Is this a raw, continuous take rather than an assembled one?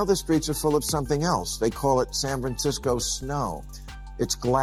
yes; 0 cuts

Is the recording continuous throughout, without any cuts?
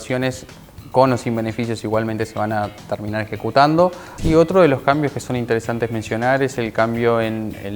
no; 1 cut; at 4.1 s

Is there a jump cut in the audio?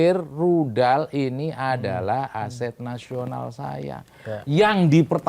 no; 0 cuts

